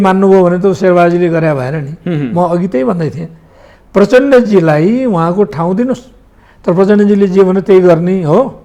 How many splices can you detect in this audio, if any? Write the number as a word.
zero